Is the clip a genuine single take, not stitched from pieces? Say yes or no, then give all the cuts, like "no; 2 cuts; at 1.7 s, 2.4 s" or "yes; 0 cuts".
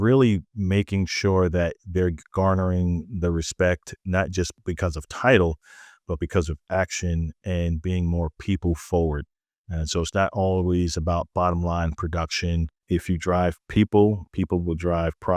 no; 2 cuts; at 4.5 s, 12.8 s